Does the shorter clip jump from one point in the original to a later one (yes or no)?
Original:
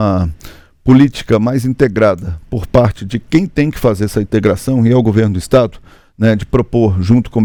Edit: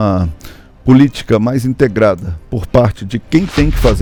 no